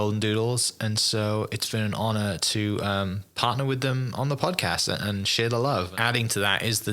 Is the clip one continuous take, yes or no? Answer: no